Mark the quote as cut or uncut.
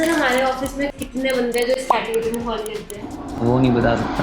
cut